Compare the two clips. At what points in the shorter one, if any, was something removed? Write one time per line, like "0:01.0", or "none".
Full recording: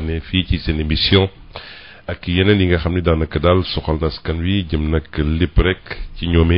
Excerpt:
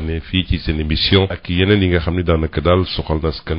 0:01.4

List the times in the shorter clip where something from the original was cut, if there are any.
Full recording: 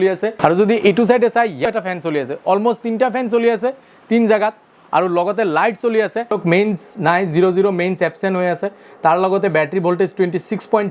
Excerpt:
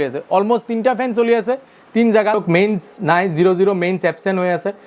0:02.3

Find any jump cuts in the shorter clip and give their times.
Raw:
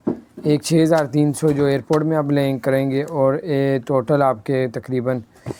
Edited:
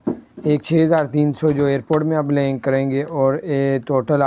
none

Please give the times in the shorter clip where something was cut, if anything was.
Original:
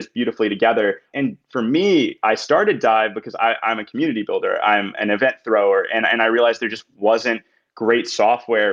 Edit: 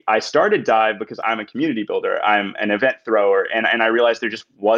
0:01.2

